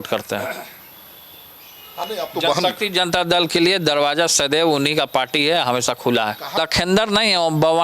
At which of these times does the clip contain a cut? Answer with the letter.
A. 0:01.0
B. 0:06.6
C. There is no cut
B